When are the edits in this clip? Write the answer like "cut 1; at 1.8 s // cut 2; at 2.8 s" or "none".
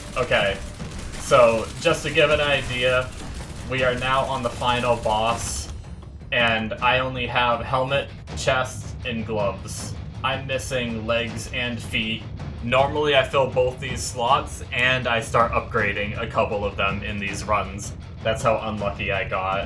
none